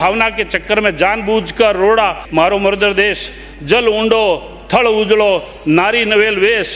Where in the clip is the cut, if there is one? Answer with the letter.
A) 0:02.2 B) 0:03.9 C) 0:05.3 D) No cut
A